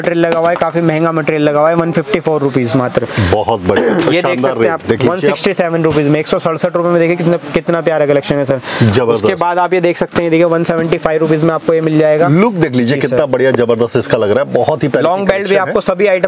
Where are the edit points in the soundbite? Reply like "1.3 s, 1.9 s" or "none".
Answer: none